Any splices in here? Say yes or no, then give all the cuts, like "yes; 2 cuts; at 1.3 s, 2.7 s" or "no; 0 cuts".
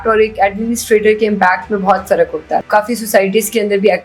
yes; 1 cut; at 2.6 s